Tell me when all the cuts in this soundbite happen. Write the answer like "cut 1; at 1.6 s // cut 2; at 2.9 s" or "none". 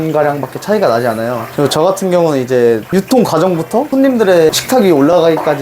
cut 1; at 4.6 s